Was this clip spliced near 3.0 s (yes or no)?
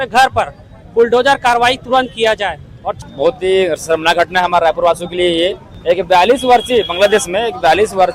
yes